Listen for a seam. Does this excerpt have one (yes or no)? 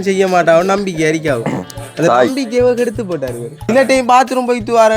yes